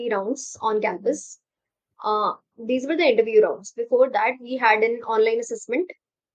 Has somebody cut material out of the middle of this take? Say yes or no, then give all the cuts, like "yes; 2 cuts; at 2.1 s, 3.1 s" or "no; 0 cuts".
no; 0 cuts